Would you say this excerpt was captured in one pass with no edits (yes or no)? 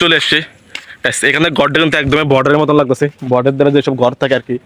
yes